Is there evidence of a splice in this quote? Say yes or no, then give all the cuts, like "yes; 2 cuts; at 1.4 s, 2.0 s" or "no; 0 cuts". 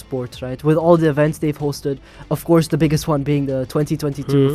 no; 0 cuts